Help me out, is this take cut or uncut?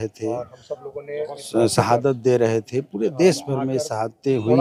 uncut